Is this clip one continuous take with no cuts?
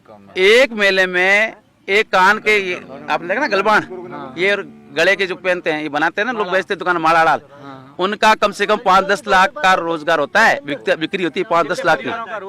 yes; 0 cuts

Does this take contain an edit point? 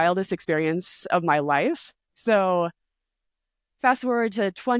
no; 0 cuts

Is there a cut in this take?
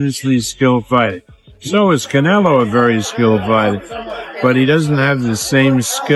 no; 0 cuts

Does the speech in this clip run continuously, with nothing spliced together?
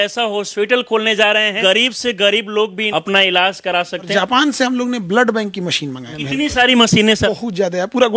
no; 5 cuts; at 1.6 s, 2.8 s, 4.1 s, 6.1 s, 7.3 s

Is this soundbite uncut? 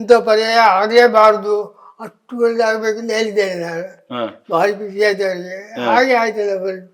yes; 0 cuts

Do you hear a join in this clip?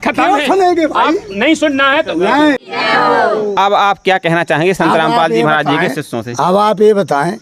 yes; 1 cut; at 2.8 s

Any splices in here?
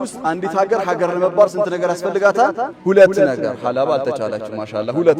no; 0 cuts

